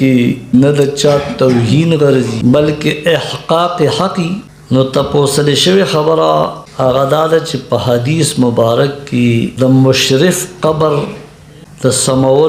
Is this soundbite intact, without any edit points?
no; 2 cuts; at 2.3 s, 4.5 s

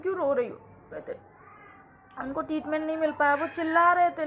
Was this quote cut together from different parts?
yes; 1 cut; at 0.9 s

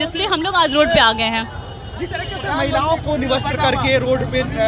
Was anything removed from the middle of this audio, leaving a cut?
no; 0 cuts

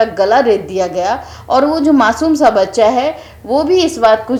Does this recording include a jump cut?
no; 0 cuts

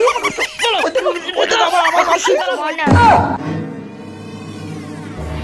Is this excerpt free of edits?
no; 1 cut; at 2.6 s

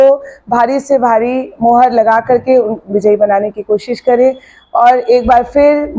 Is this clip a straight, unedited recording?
yes; 0 cuts

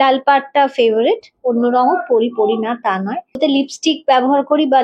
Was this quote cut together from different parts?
yes; 1 cut; at 3.4 s

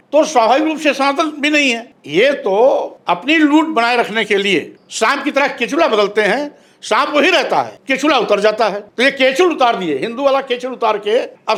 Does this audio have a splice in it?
no; 0 cuts

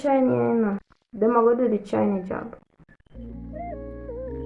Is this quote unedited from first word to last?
yes; 0 cuts

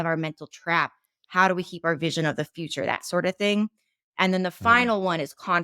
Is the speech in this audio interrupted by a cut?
yes; 1 cut; at 2.5 s

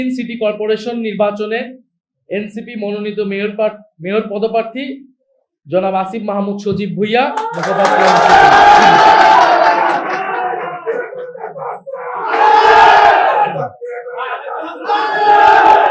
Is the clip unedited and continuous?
yes; 0 cuts

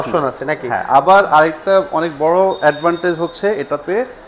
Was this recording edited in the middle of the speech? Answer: no; 0 cuts

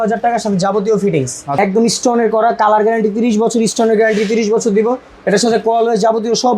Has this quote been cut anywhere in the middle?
yes; 1 cut; at 1.4 s

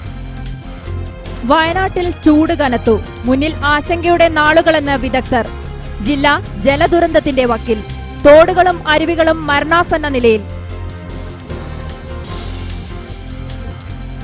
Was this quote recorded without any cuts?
no; 1 cut; at 1.2 s

